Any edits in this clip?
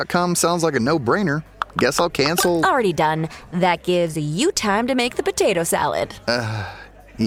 no; 0 cuts

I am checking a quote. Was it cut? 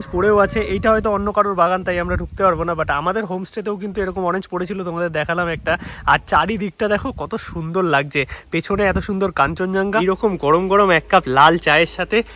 yes; 1 cut; at 10.0 s

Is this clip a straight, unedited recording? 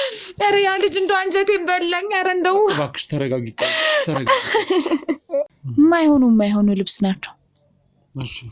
no; 1 cut; at 5.5 s

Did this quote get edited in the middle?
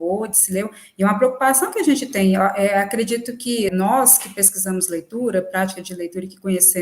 yes; 1 cut; at 3.7 s

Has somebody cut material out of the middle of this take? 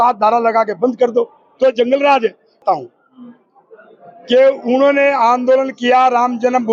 yes; 1 cut; at 2.6 s

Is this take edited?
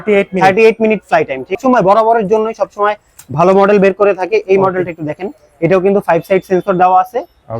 yes; 1 cut; at 1.6 s

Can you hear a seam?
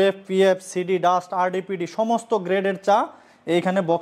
no; 0 cuts

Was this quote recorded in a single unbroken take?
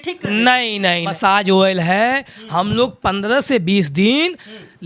no; 1 cut; at 1.1 s

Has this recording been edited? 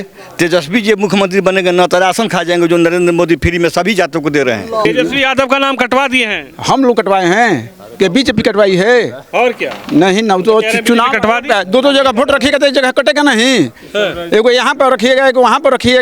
yes; 1 cut; at 4.8 s

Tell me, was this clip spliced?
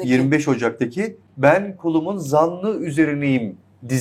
no; 0 cuts

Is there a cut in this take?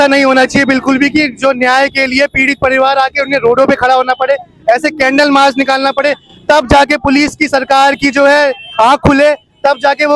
no; 0 cuts

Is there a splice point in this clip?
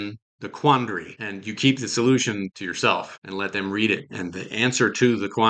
no; 0 cuts

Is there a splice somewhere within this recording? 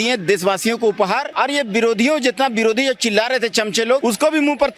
yes; 2 cuts; at 1.3 s, 4.0 s

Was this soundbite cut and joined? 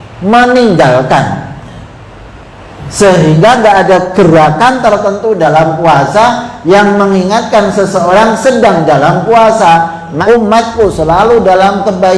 yes; 1 cut; at 10.1 s

